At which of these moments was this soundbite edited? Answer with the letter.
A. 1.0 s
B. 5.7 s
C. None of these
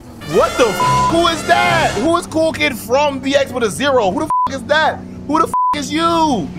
C